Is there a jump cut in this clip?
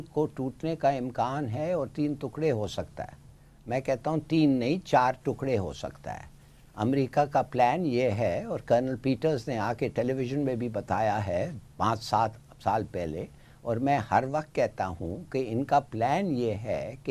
no; 0 cuts

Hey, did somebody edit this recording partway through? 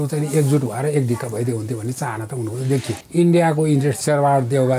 yes; 2 cuts; at 3.0 s, 4.0 s

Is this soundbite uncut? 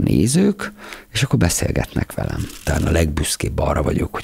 no; 1 cut; at 2.6 s

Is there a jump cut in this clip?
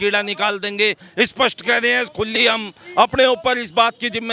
no; 0 cuts

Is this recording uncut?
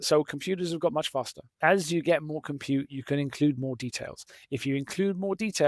no; 1 cut; at 1.5 s

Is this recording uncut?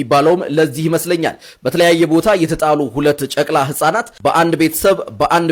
yes; 0 cuts

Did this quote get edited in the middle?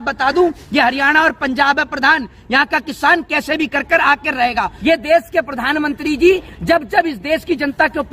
yes; 1 cut; at 4.7 s

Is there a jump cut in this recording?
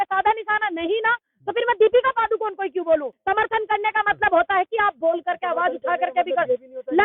yes; 1 cut; at 3.1 s

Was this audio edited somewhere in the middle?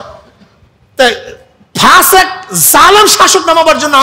no; 0 cuts

